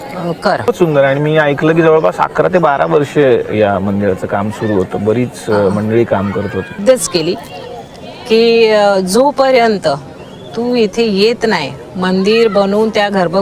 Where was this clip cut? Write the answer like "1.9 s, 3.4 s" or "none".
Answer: 0.7 s, 6.8 s